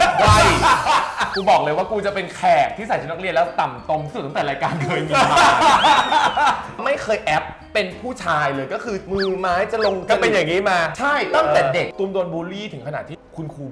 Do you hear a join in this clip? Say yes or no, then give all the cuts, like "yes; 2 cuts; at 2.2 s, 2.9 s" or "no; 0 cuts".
yes; 3 cuts; at 1.3 s, 6.8 s, 11.9 s